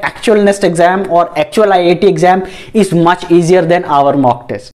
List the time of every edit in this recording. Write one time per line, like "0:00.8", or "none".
none